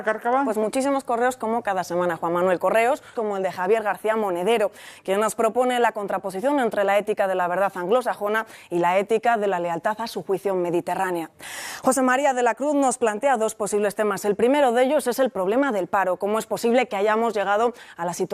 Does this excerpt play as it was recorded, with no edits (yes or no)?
no